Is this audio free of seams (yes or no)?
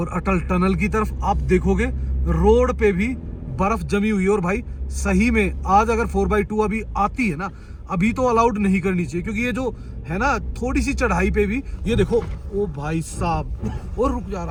yes